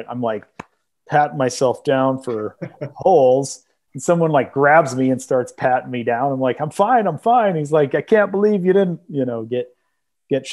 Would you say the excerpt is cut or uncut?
uncut